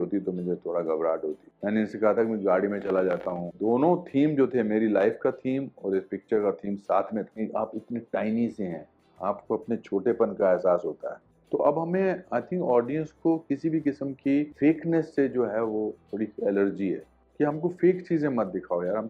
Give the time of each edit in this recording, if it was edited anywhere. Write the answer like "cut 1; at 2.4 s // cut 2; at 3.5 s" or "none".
cut 1; at 1.5 s // cut 2; at 3.4 s // cut 3; at 7.3 s // cut 4; at 11.3 s

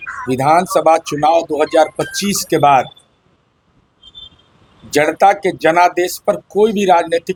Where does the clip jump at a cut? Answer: none

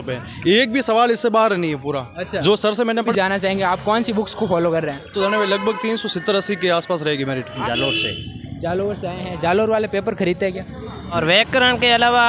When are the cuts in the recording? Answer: cut 1; at 3.1 s // cut 2; at 5.1 s // cut 3; at 7.6 s // cut 4; at 11.2 s

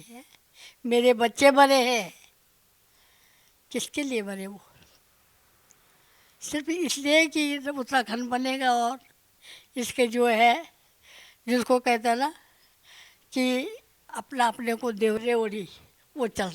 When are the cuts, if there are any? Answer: cut 1; at 14.2 s // cut 2; at 15.2 s

